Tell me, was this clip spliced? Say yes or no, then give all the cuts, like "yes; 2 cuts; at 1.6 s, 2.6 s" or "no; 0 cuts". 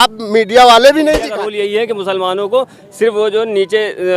yes; 1 cut; at 1.4 s